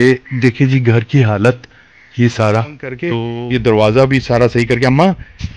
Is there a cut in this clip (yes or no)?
yes